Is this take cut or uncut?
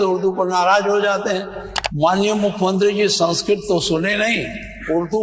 cut